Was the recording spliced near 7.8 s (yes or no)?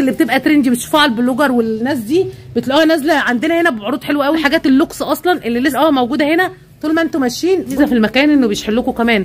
yes